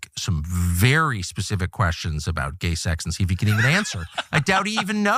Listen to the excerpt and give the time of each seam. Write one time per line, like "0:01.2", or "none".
none